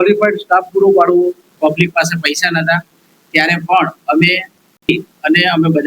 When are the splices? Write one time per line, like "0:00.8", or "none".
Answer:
0:01.4